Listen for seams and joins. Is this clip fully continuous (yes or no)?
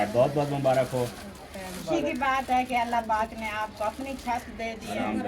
no